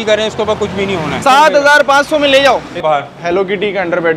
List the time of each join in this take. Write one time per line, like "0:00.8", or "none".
0:01.2
0:02.8